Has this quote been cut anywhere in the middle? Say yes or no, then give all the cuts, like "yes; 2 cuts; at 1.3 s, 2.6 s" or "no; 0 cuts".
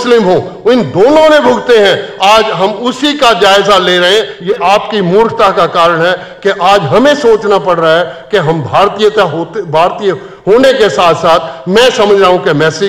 yes; 1 cut; at 4.3 s